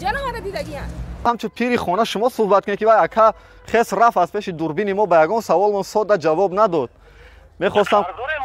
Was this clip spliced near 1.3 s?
yes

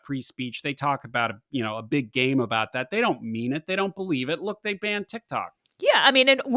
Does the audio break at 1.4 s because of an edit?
no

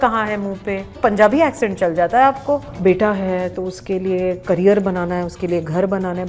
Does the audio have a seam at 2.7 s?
yes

